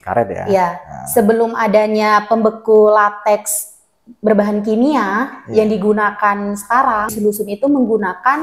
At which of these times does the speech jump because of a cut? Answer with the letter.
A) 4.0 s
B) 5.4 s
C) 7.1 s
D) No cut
C